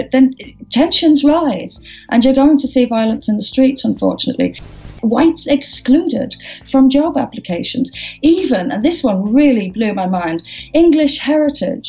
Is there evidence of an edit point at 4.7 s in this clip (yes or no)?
yes